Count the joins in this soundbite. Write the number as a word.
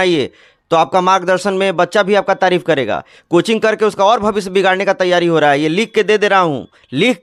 zero